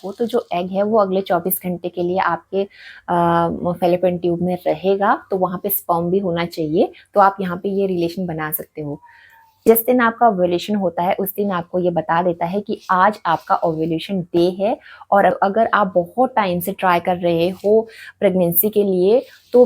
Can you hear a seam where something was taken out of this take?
yes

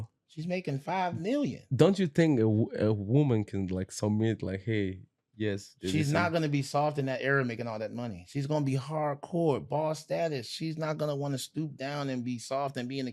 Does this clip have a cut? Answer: no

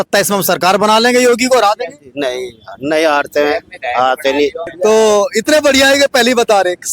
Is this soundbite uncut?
no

